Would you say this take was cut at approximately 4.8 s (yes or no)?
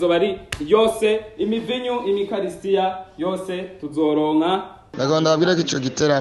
yes